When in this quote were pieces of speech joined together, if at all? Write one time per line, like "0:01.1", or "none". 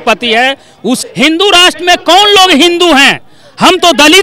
0:01.0